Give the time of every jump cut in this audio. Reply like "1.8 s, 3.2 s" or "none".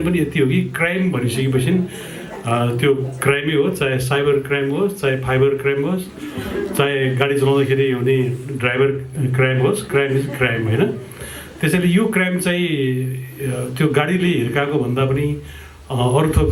none